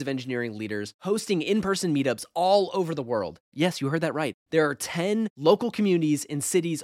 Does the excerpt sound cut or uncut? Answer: uncut